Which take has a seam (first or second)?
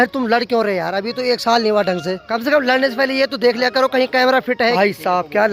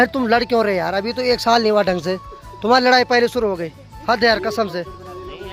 first